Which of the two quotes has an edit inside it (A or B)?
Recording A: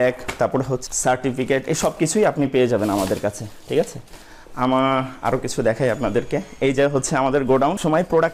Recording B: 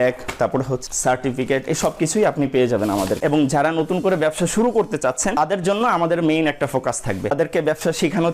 B